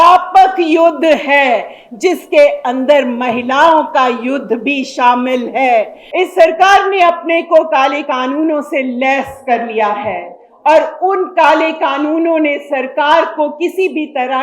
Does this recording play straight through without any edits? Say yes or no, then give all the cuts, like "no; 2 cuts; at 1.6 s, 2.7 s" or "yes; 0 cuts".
no; 1 cut; at 6.0 s